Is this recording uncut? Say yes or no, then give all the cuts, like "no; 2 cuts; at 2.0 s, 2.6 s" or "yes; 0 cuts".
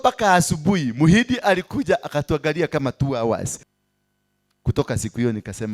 no; 1 cut; at 3.6 s